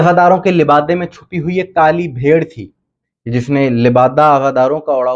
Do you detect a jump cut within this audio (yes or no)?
no